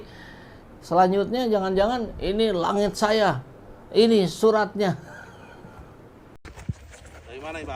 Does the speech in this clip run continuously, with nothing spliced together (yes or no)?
no